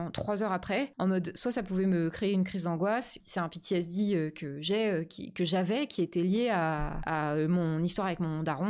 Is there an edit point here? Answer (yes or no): yes